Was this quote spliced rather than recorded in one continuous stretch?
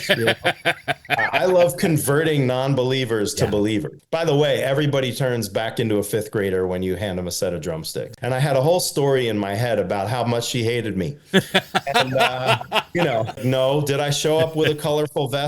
yes; 3 cuts; at 4.0 s, 8.1 s, 13.4 s

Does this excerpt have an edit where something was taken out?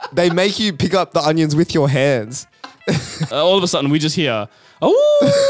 yes; 1 cut; at 3.3 s

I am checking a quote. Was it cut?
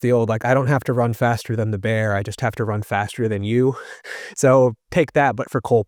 no; 0 cuts

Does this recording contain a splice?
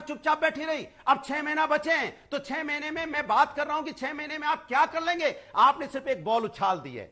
no; 0 cuts

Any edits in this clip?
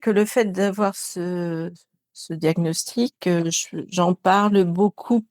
no; 0 cuts

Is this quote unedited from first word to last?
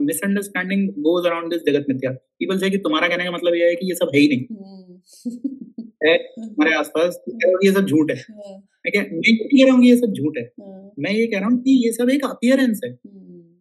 yes; 0 cuts

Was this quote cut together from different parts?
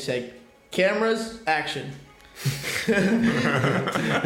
no; 0 cuts

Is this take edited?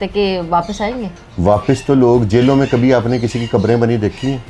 yes; 1 cut; at 1.2 s

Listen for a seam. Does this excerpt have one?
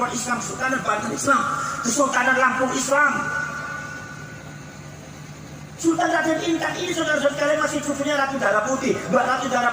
yes; 1 cut; at 2.9 s

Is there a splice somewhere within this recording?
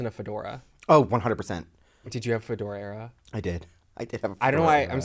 yes; 1 cut; at 2.1 s

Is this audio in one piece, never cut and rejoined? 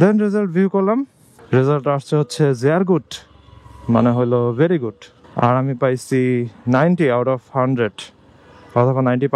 yes; 0 cuts

